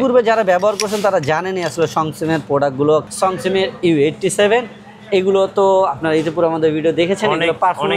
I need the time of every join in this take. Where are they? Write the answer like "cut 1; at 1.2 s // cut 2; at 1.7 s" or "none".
cut 1; at 3.1 s